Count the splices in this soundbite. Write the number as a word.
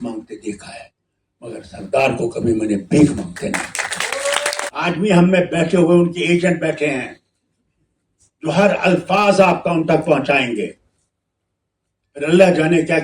one